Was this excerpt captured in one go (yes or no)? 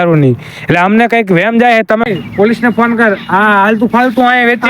no